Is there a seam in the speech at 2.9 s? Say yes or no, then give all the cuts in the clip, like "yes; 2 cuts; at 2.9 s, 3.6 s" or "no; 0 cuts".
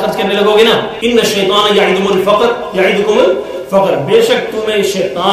no; 1 cut; at 0.9 s